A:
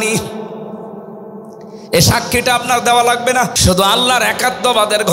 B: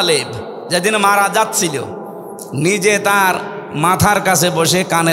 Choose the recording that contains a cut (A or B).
A